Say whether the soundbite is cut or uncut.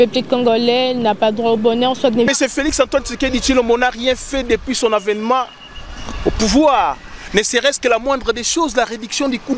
cut